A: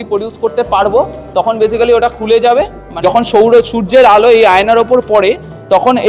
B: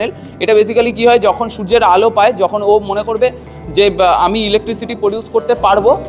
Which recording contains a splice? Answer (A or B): A